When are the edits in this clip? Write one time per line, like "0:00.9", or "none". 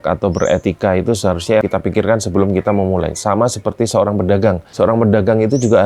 0:01.6
0:04.7